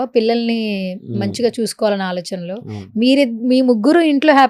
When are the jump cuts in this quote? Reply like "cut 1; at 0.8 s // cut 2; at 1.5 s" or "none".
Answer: none